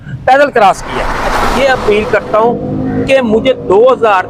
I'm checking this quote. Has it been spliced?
yes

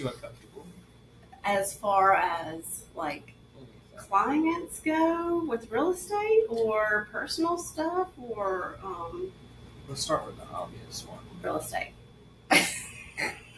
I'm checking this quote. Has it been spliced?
no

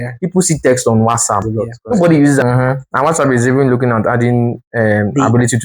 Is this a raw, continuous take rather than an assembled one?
no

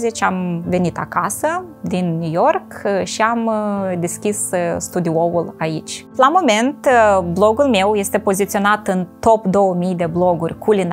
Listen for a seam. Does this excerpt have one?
yes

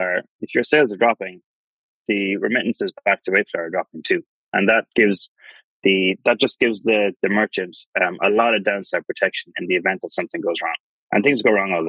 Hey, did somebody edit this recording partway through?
no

